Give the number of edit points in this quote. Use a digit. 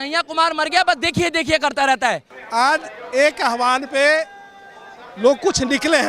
1